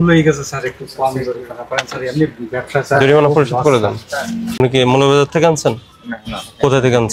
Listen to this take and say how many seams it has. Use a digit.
1